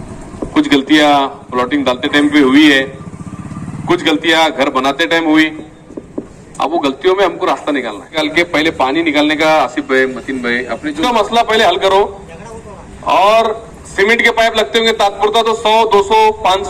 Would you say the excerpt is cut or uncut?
cut